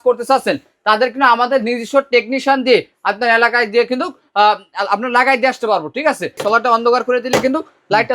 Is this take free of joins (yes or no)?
no